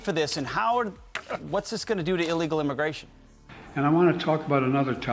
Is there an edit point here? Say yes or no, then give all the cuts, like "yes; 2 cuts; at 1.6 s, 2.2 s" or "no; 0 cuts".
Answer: no; 0 cuts